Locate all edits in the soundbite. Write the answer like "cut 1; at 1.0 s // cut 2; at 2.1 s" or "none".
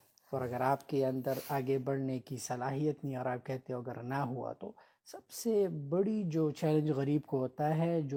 none